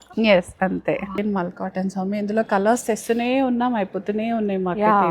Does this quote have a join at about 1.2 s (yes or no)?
yes